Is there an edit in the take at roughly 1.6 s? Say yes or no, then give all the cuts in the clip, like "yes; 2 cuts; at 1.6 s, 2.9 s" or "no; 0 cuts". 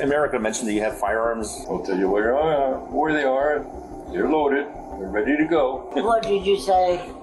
yes; 2 cuts; at 1.6 s, 5.9 s